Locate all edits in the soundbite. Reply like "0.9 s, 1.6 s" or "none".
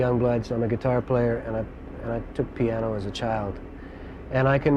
3.1 s